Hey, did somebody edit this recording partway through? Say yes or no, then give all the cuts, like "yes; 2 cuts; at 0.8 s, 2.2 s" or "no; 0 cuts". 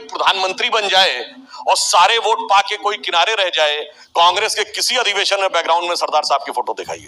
yes; 1 cut; at 3.9 s